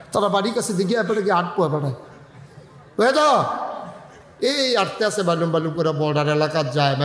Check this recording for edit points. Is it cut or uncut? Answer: cut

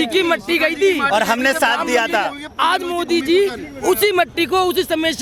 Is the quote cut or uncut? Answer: uncut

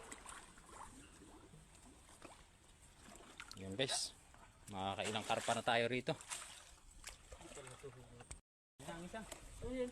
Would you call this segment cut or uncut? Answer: cut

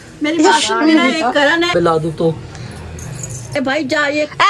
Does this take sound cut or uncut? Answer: cut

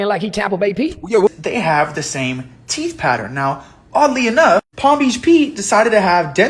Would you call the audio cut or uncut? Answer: cut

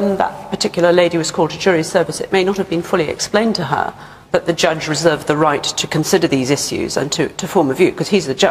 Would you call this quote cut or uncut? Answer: cut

